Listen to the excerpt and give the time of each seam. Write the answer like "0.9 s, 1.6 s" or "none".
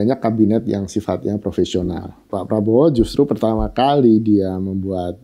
2.2 s